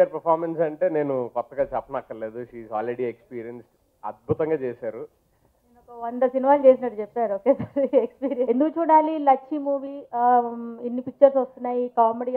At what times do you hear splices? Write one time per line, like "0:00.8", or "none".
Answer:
0:08.4